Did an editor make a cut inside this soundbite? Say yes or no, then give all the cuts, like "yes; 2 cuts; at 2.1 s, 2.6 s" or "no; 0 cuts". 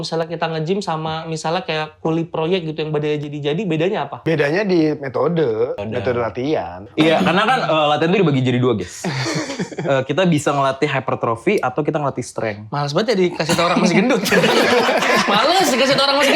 yes; 3 cuts; at 4.1 s, 5.8 s, 6.9 s